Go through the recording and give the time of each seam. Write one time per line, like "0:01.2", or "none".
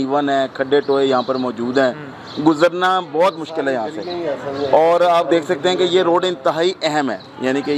none